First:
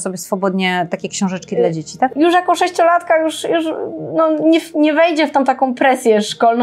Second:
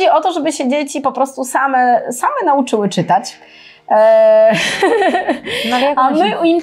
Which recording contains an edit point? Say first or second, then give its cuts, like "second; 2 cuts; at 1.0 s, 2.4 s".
first; 1 cut; at 2.1 s